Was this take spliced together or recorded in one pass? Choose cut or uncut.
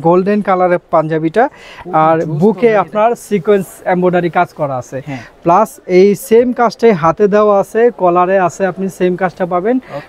uncut